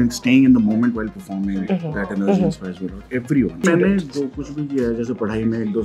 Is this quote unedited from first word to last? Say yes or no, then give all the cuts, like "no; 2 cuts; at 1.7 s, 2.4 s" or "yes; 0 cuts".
no; 1 cut; at 3.6 s